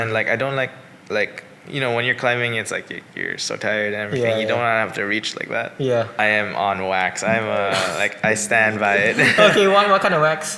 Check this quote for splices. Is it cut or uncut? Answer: cut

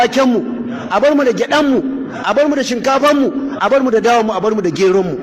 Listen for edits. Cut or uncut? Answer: uncut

